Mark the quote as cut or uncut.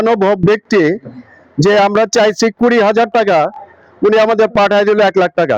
uncut